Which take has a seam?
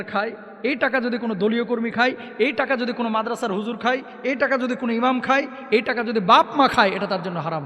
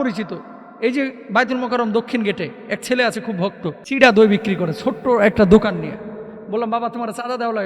second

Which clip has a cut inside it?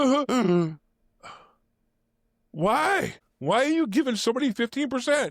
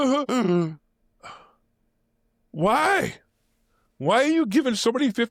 first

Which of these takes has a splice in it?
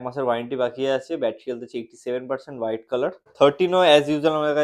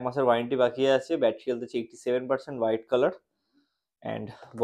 first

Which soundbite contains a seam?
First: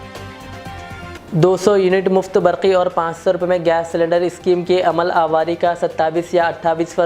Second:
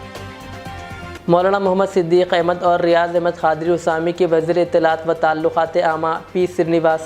second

